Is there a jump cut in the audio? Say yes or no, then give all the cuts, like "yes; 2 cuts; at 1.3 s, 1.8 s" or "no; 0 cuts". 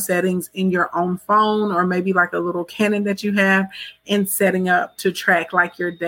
no; 0 cuts